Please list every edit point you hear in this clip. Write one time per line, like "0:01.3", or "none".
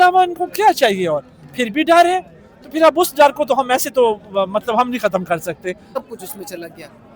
0:06.0